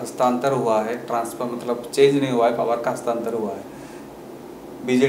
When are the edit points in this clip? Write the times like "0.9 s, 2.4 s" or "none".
none